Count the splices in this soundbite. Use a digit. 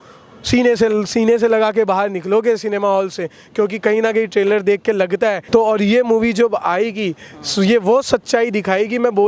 1